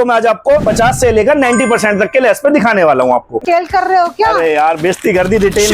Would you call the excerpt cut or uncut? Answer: cut